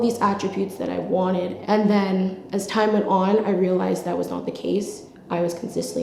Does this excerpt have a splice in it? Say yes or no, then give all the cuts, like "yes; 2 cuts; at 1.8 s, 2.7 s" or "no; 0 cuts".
yes; 1 cut; at 1.5 s